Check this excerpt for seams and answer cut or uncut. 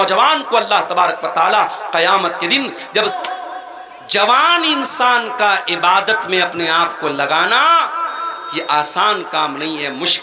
cut